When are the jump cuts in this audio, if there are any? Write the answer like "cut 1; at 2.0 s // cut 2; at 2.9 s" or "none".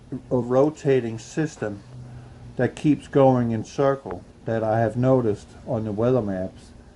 cut 1; at 3.4 s